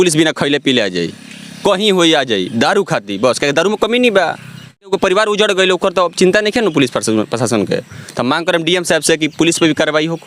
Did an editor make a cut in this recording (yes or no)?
yes